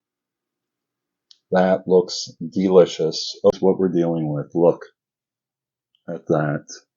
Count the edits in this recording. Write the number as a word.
one